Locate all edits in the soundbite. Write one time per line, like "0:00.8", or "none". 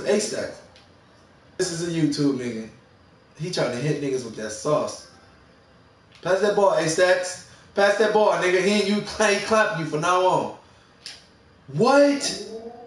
0:01.6